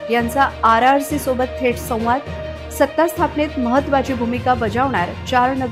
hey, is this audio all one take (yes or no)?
yes